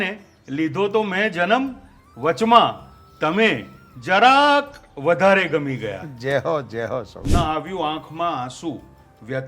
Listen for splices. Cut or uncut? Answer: cut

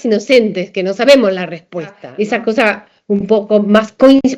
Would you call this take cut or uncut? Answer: cut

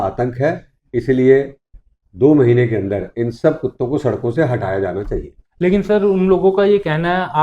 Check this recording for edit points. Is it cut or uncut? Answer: uncut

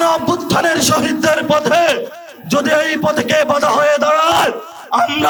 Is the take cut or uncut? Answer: uncut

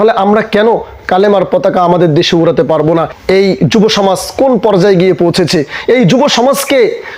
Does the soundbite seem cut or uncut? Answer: cut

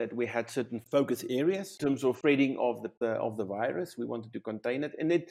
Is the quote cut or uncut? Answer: cut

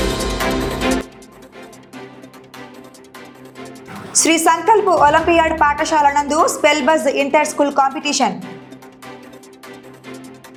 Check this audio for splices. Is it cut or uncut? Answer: uncut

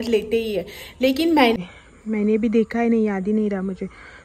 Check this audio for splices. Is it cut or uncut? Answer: cut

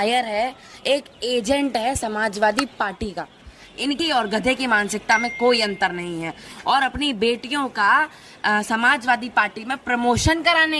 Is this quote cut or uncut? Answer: cut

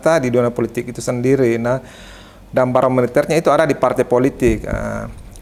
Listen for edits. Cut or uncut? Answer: uncut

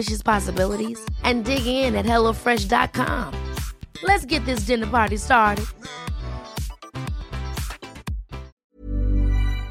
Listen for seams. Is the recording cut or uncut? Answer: cut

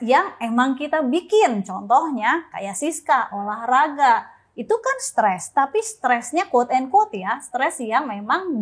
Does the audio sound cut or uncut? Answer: uncut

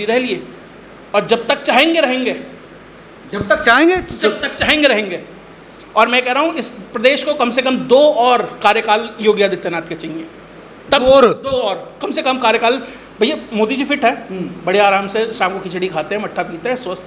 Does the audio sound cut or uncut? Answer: uncut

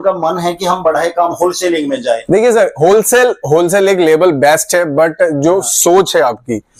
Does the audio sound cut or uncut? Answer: uncut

